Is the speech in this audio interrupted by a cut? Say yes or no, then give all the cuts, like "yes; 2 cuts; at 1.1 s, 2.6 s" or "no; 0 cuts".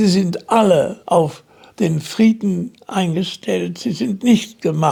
no; 0 cuts